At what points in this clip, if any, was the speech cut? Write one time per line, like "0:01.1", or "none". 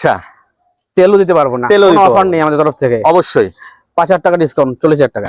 none